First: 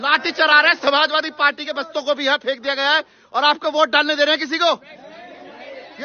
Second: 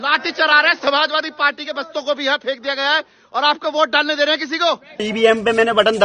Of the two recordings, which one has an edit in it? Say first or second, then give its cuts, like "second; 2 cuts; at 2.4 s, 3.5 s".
second; 1 cut; at 5.1 s